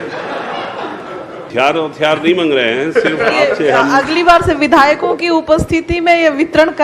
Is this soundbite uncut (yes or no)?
no